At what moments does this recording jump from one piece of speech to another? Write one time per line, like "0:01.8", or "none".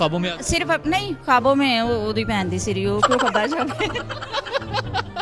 none